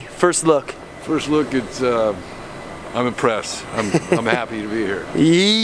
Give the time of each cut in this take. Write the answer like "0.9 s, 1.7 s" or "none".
none